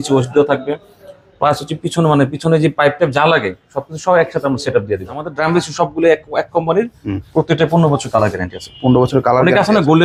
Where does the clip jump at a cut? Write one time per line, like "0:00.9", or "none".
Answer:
0:05.3